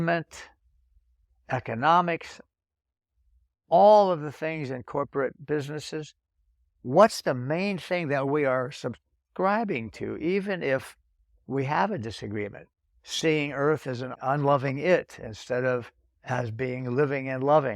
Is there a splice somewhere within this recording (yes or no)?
yes